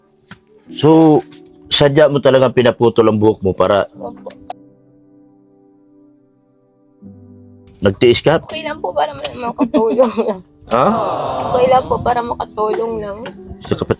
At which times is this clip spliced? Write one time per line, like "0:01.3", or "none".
0:08.4

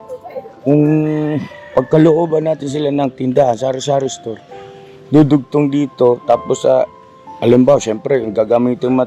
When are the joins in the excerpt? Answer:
none

